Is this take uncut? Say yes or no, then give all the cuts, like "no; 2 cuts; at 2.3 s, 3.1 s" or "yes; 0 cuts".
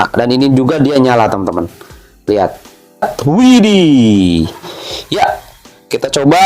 no; 1 cut; at 3.1 s